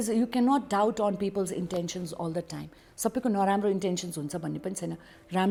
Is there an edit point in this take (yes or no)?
no